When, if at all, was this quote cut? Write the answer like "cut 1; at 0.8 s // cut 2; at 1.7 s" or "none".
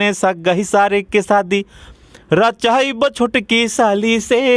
none